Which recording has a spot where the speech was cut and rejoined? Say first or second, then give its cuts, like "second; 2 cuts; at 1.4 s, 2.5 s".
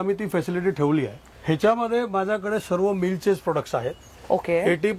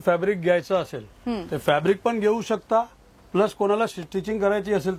first; 1 cut; at 1.2 s